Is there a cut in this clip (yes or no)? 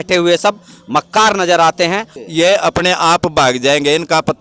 yes